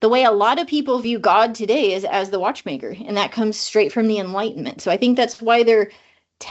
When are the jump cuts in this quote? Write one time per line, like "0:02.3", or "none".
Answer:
0:01.0